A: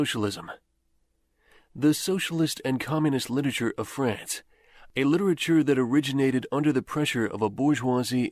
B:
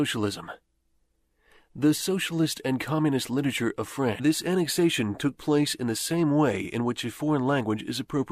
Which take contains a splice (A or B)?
A